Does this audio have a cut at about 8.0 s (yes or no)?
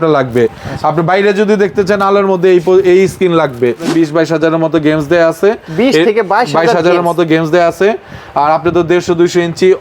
no